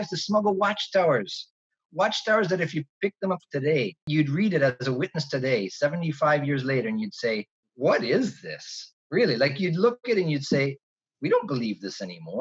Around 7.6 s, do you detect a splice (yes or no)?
yes